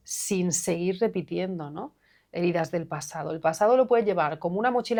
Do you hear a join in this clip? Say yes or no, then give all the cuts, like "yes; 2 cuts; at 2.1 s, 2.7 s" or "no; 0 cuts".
no; 0 cuts